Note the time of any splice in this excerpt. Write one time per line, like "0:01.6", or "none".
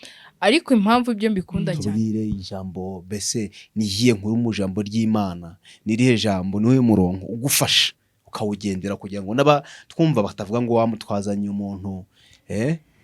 0:01.6